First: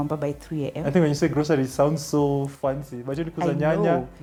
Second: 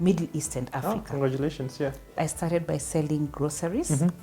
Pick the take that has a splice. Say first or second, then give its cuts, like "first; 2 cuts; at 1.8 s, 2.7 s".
second; 1 cut; at 2.2 s